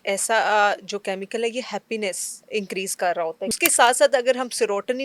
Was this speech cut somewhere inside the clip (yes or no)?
yes